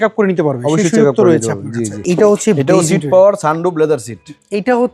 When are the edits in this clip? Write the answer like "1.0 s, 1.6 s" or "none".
2.0 s